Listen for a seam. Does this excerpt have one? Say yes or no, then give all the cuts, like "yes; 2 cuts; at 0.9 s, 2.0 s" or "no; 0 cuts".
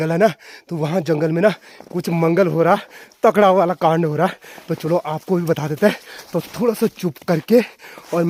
no; 0 cuts